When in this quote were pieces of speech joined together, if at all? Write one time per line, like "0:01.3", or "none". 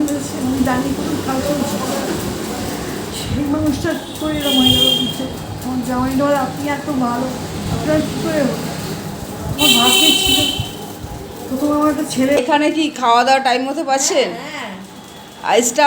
0:12.4